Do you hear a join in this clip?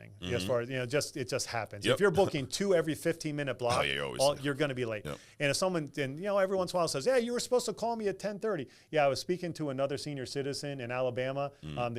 yes; 1 cut; at 2.5 s

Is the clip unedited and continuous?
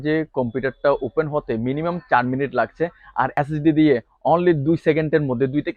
no; 1 cut; at 3.3 s

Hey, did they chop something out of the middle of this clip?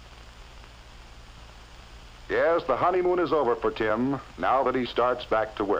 no; 0 cuts

